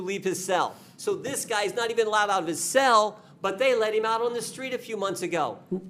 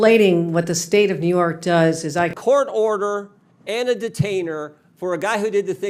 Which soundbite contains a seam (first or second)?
second